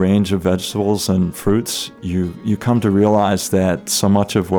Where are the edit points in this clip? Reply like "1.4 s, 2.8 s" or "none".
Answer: none